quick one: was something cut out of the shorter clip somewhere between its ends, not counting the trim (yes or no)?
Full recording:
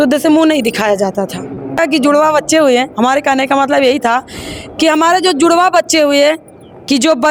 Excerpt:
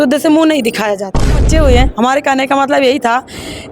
yes